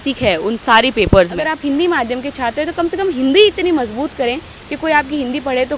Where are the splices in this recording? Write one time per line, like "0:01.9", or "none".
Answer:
0:01.5